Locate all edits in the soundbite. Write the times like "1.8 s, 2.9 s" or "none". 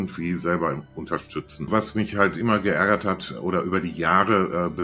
1.7 s

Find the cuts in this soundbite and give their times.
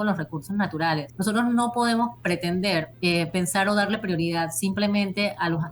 1.1 s, 2.9 s

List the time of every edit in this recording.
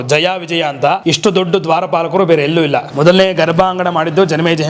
1.0 s, 2.9 s

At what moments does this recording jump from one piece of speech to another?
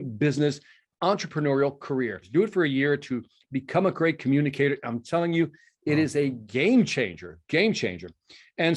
2.2 s

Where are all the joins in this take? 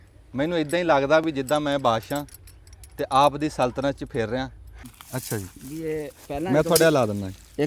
4.8 s

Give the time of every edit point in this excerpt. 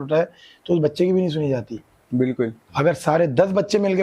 none

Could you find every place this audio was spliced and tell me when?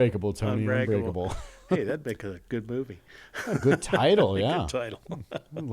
none

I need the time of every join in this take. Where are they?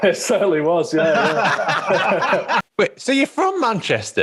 2.7 s

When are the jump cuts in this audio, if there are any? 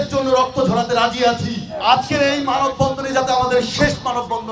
1.7 s

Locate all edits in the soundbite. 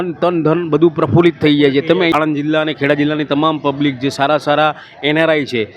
2.1 s

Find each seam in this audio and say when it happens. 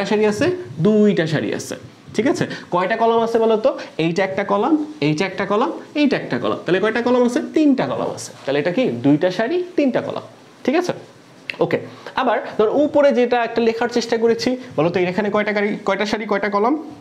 none

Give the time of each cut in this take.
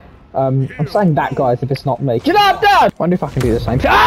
2.9 s

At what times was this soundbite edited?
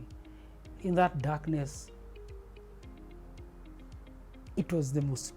none

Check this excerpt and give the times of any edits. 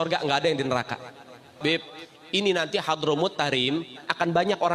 1.5 s

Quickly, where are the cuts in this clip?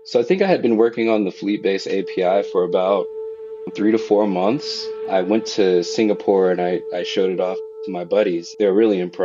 7.7 s

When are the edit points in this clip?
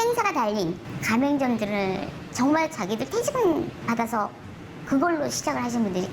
0.9 s, 2.2 s, 3.8 s

